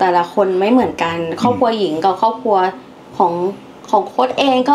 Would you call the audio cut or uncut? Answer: uncut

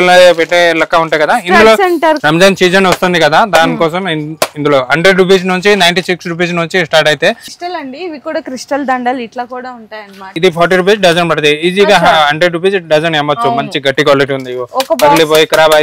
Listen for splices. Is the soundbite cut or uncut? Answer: cut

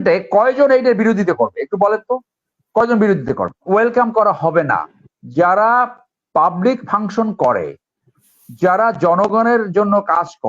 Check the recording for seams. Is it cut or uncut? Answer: cut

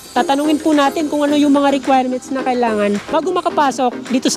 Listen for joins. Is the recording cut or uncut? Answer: uncut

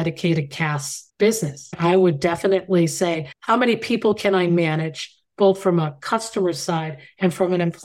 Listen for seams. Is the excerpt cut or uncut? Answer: cut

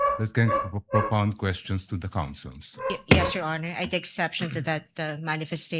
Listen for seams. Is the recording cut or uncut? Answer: cut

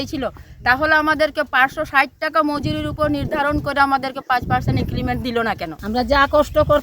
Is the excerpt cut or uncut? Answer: cut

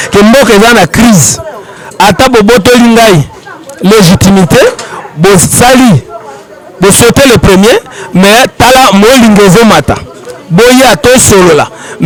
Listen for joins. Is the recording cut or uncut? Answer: uncut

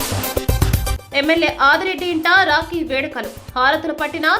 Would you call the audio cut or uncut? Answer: cut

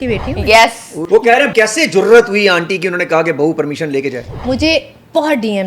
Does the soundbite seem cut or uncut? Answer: cut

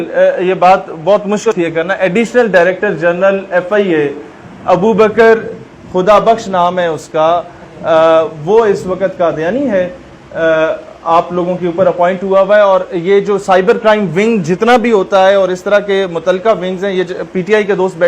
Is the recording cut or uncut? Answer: cut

